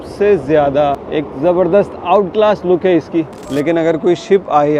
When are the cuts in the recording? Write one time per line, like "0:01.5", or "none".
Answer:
0:01.0
0:03.4